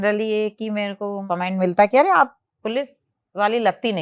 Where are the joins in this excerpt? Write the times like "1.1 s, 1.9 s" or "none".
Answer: 1.2 s